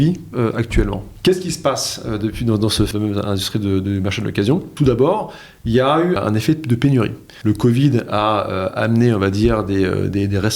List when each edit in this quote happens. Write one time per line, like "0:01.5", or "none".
0:01.1
0:02.9
0:04.7
0:06.2
0:07.3